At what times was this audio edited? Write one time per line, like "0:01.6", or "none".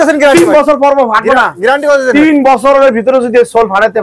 none